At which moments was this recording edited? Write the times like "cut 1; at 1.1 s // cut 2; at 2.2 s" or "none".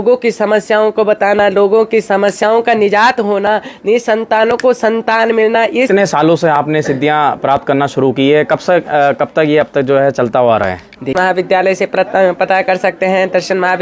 cut 1; at 5.9 s // cut 2; at 11.2 s